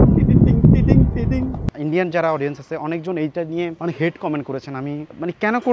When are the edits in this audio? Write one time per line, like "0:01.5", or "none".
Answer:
0:01.7

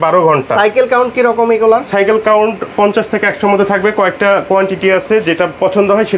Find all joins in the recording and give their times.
none

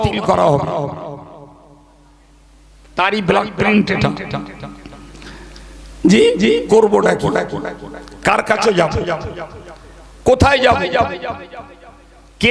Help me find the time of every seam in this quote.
none

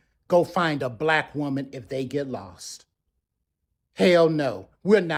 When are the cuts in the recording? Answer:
none

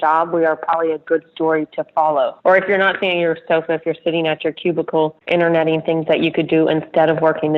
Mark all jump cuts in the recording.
0:02.3
0:05.2

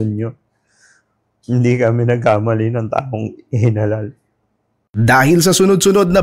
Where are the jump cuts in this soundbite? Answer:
0:04.8

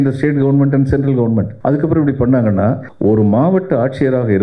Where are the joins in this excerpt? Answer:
0:01.5
0:02.9

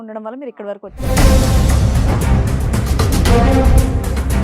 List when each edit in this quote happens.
0:01.0

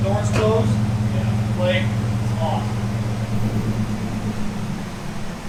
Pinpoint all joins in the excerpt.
none

